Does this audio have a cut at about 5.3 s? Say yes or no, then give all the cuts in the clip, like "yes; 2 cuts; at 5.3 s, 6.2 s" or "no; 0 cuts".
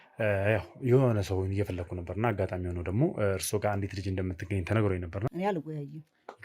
yes; 1 cut; at 5.3 s